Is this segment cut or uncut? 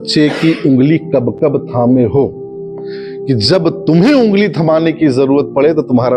uncut